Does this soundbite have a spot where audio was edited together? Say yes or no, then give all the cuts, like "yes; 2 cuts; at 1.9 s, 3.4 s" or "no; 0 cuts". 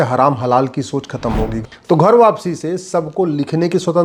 yes; 1 cut; at 1.6 s